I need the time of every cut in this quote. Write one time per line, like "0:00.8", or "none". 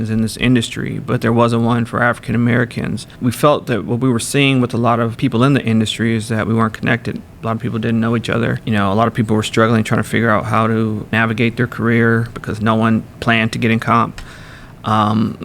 0:03.1
0:05.1
0:08.6
0:11.1